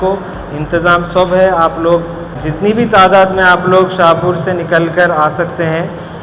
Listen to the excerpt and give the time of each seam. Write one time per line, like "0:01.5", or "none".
0:02.4